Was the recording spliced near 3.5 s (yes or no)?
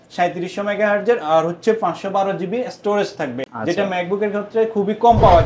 yes